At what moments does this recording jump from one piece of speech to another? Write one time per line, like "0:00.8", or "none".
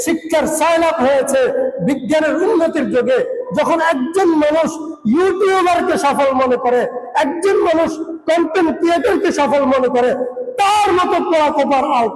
none